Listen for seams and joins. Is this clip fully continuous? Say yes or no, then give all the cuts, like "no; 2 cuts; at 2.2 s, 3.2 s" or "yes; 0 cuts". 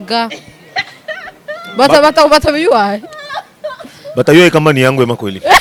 yes; 0 cuts